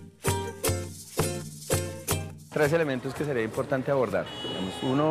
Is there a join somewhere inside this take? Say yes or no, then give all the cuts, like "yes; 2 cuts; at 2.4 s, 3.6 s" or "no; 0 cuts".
yes; 1 cut; at 2.3 s